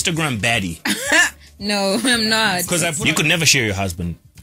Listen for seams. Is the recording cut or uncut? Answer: cut